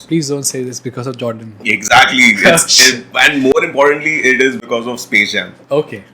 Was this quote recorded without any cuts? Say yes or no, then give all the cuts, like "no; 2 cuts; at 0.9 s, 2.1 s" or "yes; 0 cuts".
yes; 0 cuts